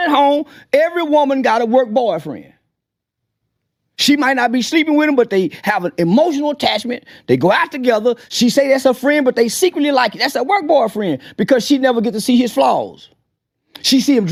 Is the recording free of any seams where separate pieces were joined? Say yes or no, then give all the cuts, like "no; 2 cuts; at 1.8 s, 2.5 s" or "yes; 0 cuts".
yes; 0 cuts